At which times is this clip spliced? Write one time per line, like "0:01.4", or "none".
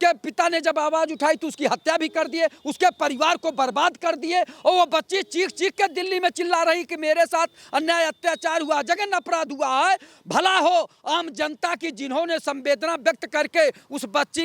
none